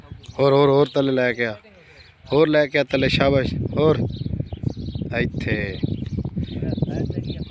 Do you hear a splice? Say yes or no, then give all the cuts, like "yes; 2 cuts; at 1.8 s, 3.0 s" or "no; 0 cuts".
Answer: no; 0 cuts